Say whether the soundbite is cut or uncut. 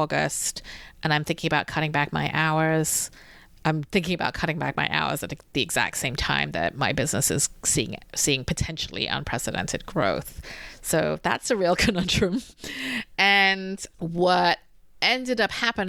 uncut